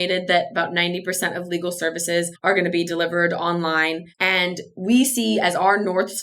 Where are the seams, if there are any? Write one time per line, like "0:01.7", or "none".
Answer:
0:02.3
0:04.1